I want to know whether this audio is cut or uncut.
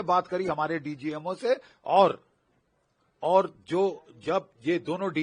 uncut